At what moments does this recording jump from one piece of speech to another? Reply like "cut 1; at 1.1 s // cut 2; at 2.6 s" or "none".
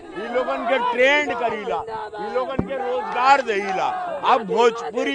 none